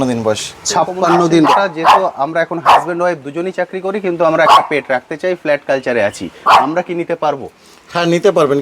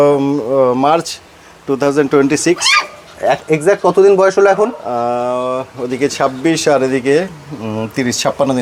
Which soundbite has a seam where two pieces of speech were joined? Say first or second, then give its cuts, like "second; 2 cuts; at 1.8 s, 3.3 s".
first; 1 cut; at 1.5 s